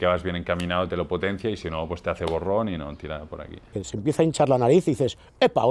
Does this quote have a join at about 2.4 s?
no; 1 cut; at 3.8 s

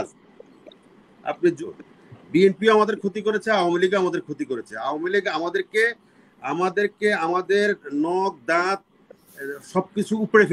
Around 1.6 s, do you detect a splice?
yes; 1 cut; at 1.6 s

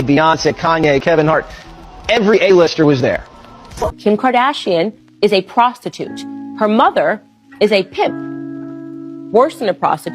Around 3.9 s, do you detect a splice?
yes; 1 cut; at 3.9 s

